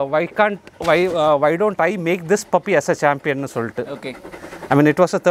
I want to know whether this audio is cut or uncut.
uncut